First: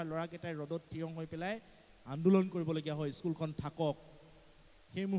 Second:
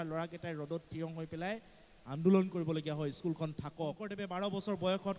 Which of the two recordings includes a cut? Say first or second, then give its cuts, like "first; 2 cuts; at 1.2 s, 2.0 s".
second; 1 cut; at 4.2 s